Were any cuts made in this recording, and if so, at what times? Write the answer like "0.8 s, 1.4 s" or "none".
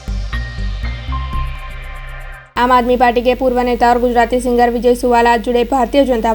2.2 s